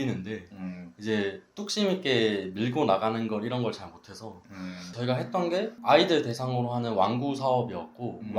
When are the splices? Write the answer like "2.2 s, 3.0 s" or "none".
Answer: 5.0 s